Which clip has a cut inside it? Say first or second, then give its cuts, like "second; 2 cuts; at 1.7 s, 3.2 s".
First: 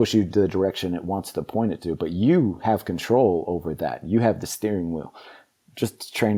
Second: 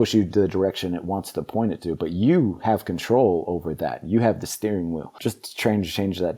second; 1 cut; at 5.1 s